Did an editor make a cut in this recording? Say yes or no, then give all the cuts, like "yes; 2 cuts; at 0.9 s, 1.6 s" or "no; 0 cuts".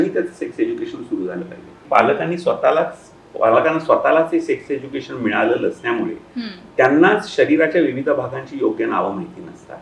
yes; 1 cut; at 1.8 s